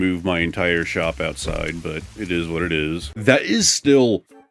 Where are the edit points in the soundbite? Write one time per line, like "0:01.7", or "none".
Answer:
0:03.0